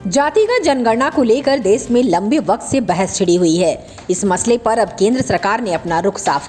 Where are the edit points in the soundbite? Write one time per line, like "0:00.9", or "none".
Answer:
none